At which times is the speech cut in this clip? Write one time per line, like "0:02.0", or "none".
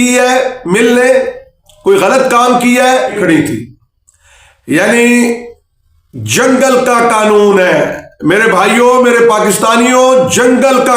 0:03.2